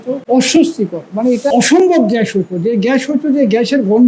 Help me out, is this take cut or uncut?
cut